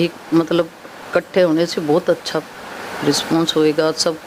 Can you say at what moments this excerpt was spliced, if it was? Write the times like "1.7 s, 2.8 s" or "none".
none